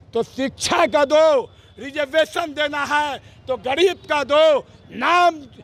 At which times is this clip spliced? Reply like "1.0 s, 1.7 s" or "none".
none